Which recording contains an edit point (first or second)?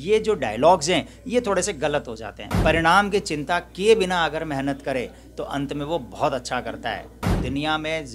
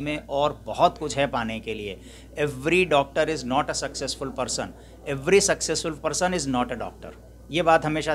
first